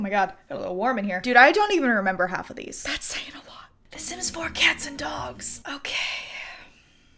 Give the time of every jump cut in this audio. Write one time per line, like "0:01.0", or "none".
0:01.2
0:03.9